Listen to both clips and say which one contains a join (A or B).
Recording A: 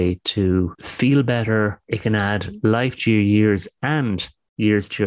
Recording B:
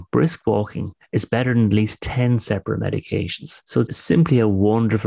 B